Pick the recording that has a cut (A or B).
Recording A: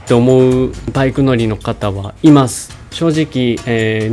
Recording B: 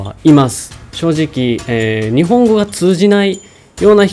A